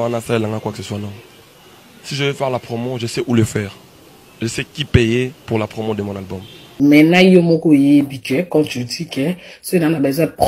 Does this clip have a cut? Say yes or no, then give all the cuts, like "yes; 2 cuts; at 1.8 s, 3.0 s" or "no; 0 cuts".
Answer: yes; 1 cut; at 6.1 s